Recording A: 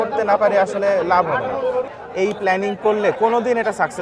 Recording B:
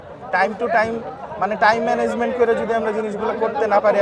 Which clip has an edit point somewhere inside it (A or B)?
A